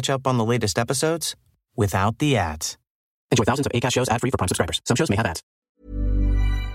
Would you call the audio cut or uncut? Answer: cut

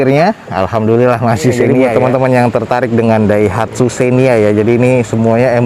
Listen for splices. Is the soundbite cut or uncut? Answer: cut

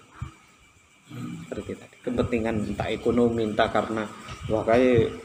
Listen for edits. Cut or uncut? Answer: uncut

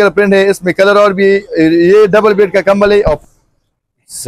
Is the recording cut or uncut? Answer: cut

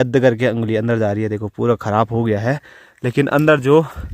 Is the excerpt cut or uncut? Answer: uncut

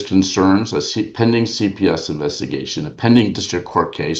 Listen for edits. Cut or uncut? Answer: uncut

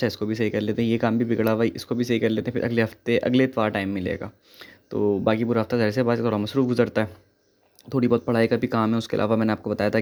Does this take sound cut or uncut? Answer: uncut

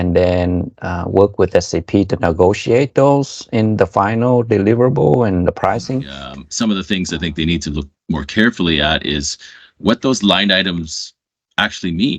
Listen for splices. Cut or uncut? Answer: cut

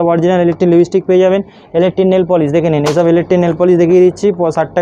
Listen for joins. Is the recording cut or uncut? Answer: uncut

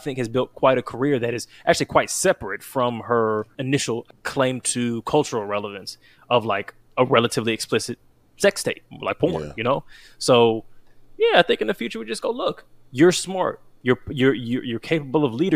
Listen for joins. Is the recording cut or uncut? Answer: cut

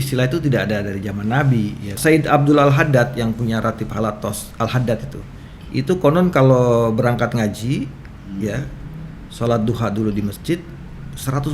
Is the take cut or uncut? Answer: cut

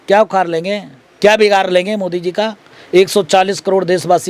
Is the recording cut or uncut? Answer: uncut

